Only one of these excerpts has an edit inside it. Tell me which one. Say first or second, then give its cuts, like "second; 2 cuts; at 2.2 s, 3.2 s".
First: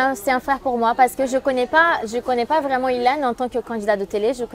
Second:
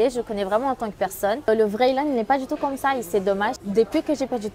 second; 2 cuts; at 1.5 s, 3.6 s